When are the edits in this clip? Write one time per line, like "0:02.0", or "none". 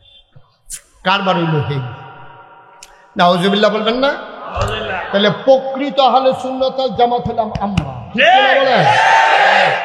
none